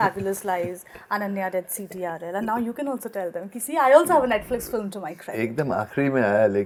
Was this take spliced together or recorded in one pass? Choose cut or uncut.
uncut